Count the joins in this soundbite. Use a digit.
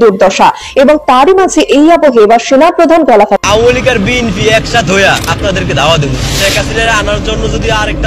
1